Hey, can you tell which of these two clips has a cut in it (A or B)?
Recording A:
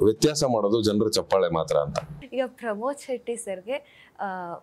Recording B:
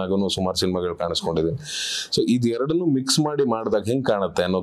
A